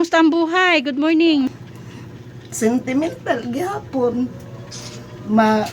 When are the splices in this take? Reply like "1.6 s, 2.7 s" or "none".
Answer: 1.5 s